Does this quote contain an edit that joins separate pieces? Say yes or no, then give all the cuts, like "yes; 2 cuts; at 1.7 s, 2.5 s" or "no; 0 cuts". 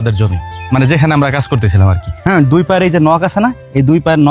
yes; 1 cut; at 2.0 s